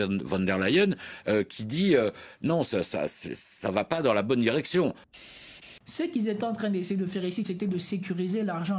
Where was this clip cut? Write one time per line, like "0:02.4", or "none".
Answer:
0:05.2